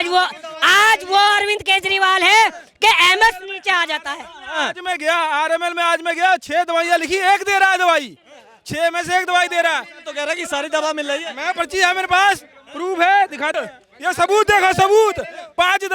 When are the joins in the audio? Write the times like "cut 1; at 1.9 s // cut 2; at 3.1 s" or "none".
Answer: cut 1; at 13.5 s